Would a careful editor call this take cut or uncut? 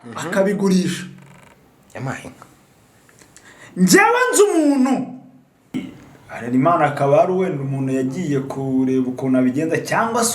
cut